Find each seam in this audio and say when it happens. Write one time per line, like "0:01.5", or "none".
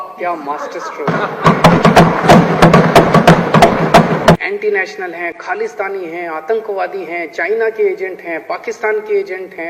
0:04.4